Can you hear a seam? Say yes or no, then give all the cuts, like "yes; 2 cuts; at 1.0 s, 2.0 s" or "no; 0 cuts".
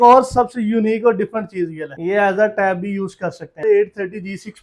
yes; 1 cut; at 3.5 s